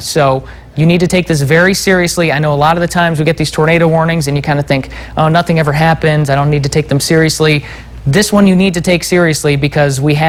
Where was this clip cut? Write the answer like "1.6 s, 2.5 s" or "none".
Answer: none